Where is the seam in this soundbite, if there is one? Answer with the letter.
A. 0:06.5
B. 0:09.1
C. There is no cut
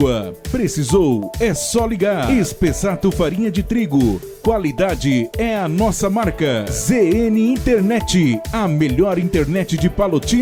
C